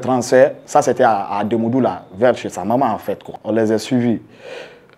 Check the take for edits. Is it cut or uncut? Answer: cut